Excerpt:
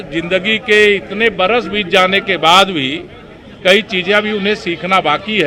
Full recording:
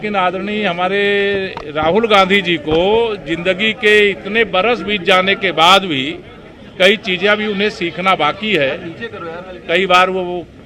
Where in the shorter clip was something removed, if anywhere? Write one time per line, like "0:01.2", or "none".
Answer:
none